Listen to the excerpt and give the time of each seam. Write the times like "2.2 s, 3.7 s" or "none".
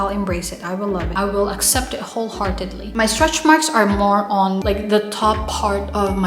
none